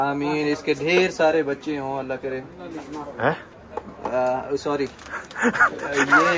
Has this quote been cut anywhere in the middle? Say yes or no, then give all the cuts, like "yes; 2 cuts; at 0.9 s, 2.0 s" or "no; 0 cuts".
no; 0 cuts